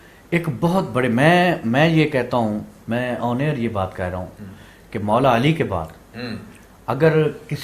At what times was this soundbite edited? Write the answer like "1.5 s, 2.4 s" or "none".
none